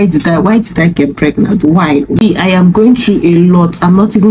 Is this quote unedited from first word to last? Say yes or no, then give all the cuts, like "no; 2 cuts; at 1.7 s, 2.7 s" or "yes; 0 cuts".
no; 1 cut; at 2.2 s